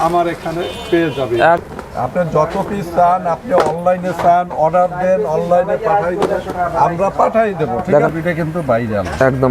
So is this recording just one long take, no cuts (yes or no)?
no